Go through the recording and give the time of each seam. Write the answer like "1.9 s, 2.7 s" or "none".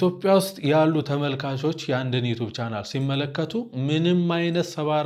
none